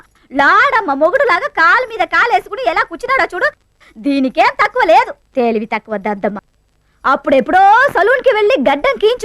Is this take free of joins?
no; 1 cut; at 6.5 s

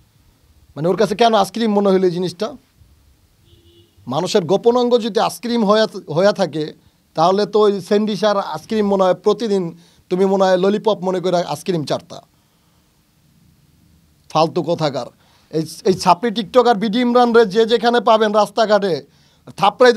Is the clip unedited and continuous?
yes; 0 cuts

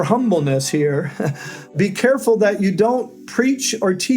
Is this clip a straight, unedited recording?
no; 2 cuts; at 1.7 s, 3.2 s

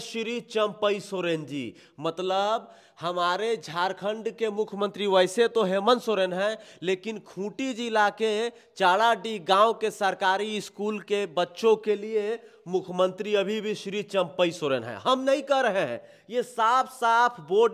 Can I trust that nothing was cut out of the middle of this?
yes; 0 cuts

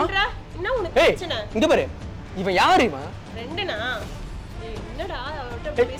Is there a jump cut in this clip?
no; 0 cuts

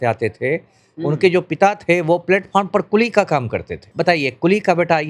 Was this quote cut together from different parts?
yes; 1 cut; at 3.9 s

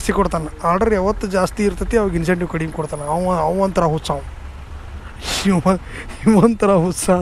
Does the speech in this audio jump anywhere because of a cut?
no; 0 cuts

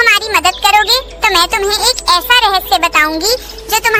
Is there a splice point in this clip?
no; 0 cuts

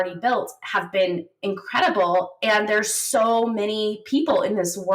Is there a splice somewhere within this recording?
no; 0 cuts

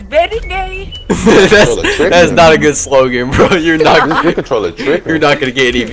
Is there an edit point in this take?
no; 0 cuts

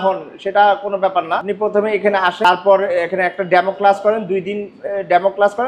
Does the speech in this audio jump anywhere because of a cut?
yes; 2 cuts; at 1.5 s, 2.4 s

